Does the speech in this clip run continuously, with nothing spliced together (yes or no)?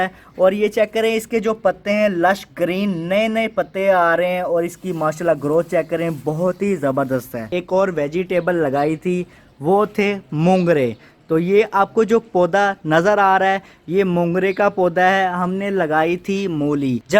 no